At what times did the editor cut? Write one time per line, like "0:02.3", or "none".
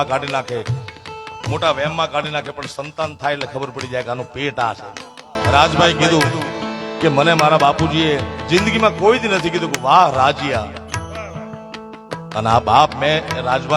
0:05.3